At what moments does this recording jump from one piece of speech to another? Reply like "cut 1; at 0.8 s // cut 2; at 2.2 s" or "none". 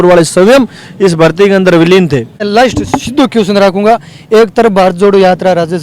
cut 1; at 2.4 s